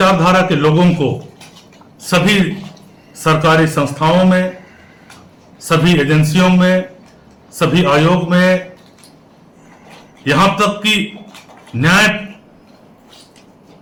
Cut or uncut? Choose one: uncut